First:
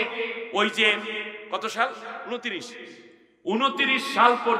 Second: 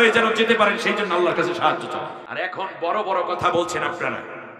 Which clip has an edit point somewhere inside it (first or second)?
second